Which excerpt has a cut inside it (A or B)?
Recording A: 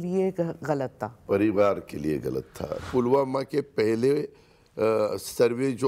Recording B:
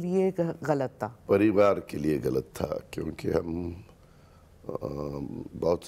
A